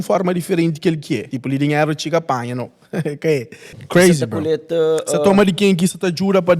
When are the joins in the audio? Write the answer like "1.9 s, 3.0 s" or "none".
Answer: 1.3 s, 3.8 s